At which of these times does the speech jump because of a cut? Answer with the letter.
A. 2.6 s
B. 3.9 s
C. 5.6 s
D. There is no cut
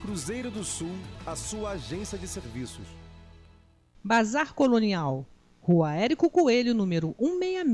B